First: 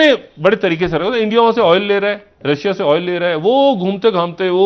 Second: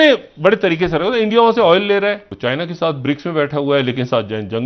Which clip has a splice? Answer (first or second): second